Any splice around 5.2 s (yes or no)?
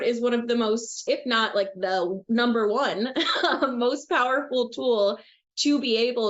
no